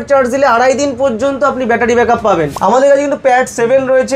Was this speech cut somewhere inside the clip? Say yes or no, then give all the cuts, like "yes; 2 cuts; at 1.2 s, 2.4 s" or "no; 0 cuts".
yes; 1 cut; at 2.5 s